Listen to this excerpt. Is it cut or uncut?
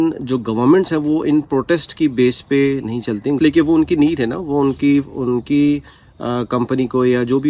cut